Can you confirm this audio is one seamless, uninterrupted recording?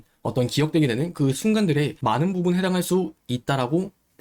yes; 0 cuts

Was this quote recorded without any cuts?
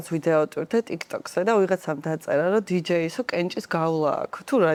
yes; 0 cuts

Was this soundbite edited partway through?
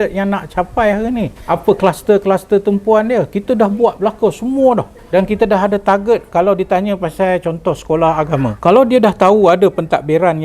yes; 3 cuts; at 1.4 s, 4.9 s, 8.5 s

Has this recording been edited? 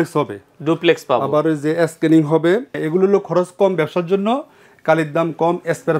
yes; 1 cut; at 2.8 s

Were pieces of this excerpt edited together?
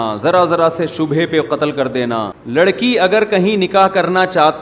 yes; 1 cut; at 2.4 s

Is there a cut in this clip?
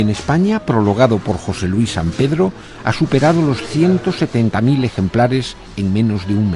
yes; 1 cut; at 2.7 s

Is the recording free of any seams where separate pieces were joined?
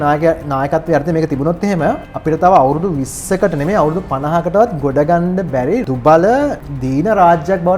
no; 3 cuts; at 2.1 s, 5.9 s, 6.6 s

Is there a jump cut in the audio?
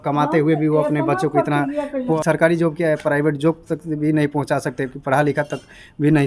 yes; 1 cut; at 2.1 s

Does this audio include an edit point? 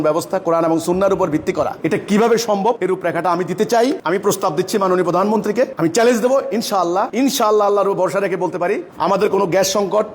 yes; 2 cuts; at 2.8 s, 7.1 s

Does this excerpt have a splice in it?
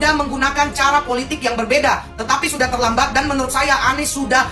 no; 0 cuts

